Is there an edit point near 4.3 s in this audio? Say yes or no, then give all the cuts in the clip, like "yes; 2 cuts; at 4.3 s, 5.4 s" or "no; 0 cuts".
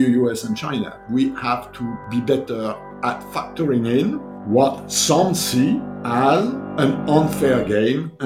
yes; 6 cuts; at 1.0 s, 2.0 s, 3.3 s, 4.3 s, 5.9 s, 6.6 s